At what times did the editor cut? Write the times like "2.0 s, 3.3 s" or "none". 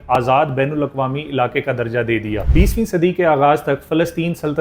2.4 s